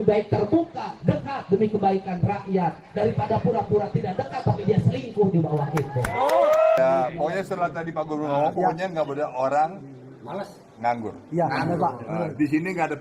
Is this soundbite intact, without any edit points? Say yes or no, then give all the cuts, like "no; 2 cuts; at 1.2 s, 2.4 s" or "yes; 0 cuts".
no; 1 cut; at 6.8 s